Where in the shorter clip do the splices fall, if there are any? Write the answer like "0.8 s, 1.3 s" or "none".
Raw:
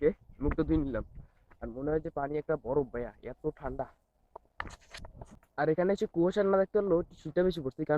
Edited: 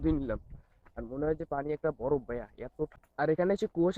3.0 s